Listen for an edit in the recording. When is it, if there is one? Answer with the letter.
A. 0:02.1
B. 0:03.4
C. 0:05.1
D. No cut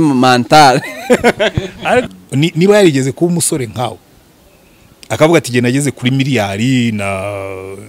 A